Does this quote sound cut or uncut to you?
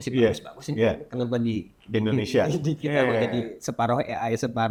uncut